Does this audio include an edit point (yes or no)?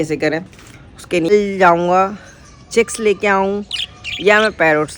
yes